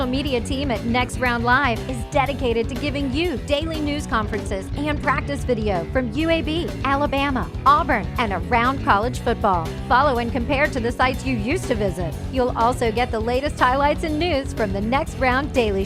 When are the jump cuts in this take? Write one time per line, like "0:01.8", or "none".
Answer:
none